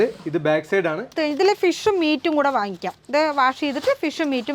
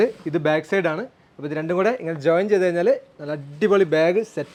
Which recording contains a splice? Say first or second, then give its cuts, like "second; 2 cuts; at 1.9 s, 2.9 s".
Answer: first; 1 cut; at 1.1 s